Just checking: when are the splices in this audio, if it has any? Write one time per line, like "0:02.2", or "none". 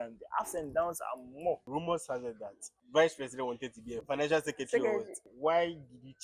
0:01.6
0:02.7
0:04.0
0:05.2